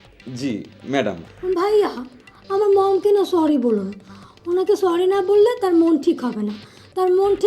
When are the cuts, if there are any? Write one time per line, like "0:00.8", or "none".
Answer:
0:01.3